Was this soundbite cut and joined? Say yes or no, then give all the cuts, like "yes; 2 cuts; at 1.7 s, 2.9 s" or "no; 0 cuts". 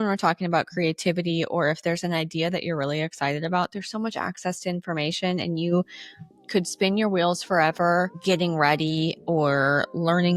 no; 0 cuts